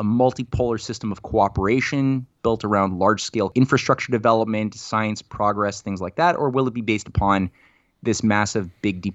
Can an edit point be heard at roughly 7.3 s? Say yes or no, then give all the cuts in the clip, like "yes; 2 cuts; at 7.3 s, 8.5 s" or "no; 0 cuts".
no; 1 cut; at 3.5 s